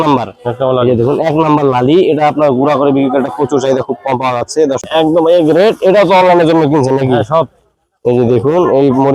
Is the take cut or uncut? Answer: cut